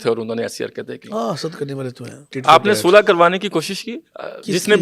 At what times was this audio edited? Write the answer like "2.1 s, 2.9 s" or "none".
2.3 s